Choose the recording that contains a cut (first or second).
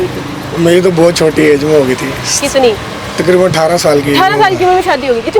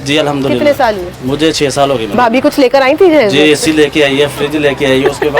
second